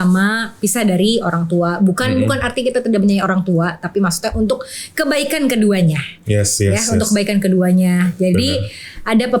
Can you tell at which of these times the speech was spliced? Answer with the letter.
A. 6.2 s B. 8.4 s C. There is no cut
C